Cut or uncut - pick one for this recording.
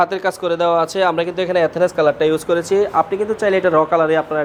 uncut